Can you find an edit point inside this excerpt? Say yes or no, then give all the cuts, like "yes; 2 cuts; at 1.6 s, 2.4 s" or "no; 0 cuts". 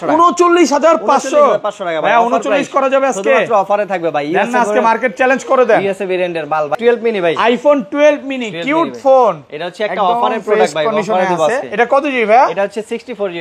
yes; 1 cut; at 6.7 s